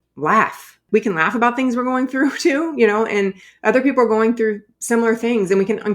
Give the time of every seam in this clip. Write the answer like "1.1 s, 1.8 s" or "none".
0.8 s, 4.7 s